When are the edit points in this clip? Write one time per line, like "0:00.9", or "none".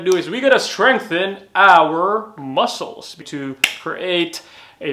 none